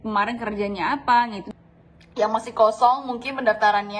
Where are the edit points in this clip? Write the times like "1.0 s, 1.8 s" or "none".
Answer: 1.4 s